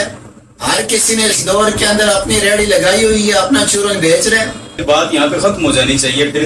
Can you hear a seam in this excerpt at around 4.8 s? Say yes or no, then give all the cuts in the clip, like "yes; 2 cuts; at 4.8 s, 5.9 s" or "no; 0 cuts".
yes; 1 cut; at 4.8 s